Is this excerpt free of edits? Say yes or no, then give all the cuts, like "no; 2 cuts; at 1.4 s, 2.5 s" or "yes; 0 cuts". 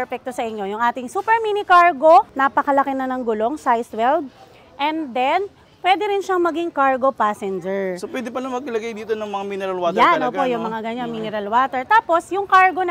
no; 1 cut; at 2.3 s